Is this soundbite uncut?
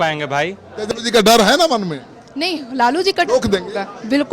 no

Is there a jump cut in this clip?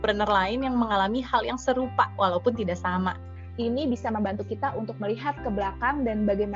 yes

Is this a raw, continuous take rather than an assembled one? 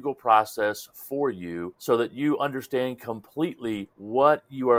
yes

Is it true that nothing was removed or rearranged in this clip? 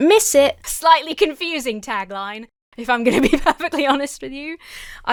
yes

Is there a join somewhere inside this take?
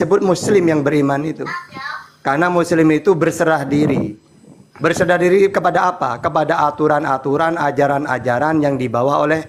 no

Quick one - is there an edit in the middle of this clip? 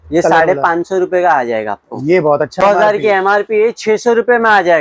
yes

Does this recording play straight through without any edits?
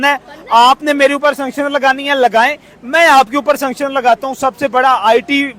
yes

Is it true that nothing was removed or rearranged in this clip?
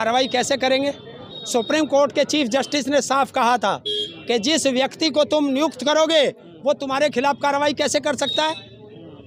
yes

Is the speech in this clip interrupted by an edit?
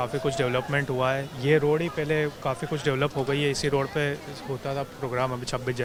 no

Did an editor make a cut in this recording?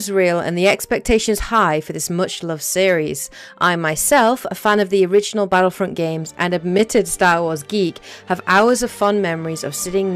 yes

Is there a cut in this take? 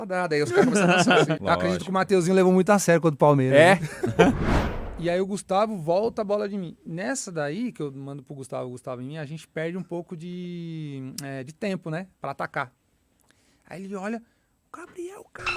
yes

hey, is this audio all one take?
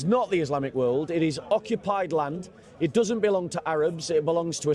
yes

